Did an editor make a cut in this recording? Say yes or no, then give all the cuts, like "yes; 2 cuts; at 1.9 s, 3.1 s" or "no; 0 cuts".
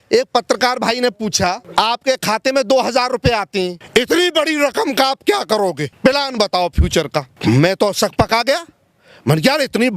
yes; 4 cuts; at 1.6 s, 3.8 s, 5.9 s, 7.3 s